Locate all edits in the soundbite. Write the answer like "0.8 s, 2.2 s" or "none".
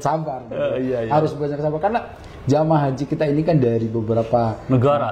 none

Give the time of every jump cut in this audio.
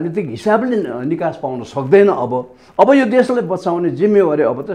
none

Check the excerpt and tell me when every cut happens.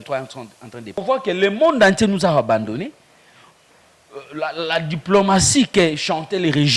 1.0 s

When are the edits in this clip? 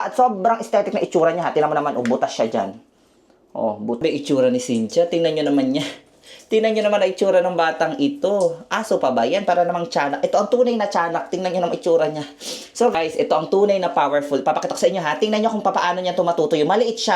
4.0 s

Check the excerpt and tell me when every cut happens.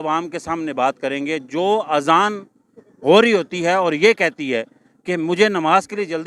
none

